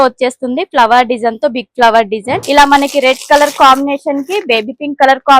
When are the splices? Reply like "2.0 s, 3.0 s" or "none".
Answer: 2.3 s